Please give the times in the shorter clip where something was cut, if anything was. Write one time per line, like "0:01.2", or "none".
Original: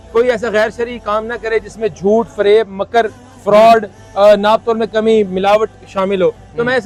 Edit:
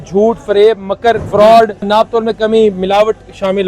0:01.2
0:01.9